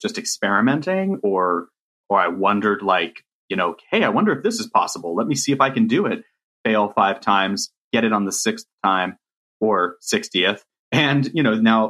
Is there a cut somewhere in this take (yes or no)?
no